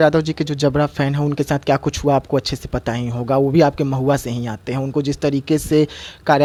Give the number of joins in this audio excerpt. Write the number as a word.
zero